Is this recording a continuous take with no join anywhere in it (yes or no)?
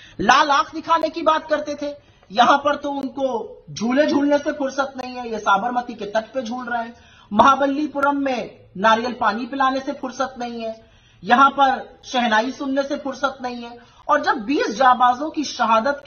yes